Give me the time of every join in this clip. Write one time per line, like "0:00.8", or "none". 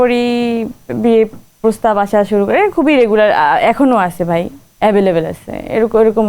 none